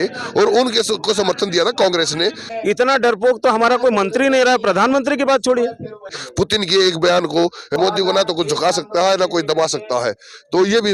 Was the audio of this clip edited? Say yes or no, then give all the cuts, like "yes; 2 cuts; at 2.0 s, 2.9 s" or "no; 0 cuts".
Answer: yes; 3 cuts; at 2.5 s, 6.2 s, 7.7 s